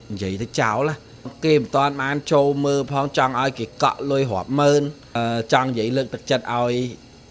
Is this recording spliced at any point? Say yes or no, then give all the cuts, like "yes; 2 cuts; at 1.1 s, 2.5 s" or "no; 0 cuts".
yes; 2 cuts; at 1.3 s, 5.1 s